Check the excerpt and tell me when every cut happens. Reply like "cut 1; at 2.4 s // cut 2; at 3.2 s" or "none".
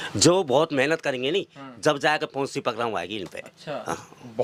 none